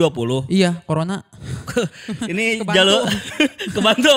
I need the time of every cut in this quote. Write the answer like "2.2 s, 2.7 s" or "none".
none